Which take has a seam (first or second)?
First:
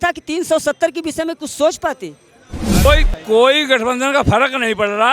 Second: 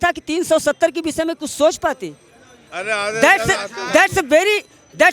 first